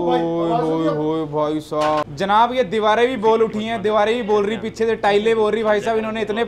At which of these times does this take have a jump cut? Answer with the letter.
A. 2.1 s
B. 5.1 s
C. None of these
A